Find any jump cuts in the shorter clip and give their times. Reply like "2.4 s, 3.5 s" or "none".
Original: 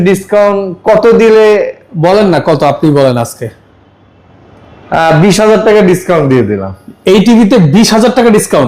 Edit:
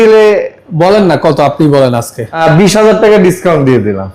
2.4 s